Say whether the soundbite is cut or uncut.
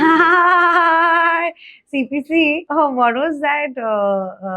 cut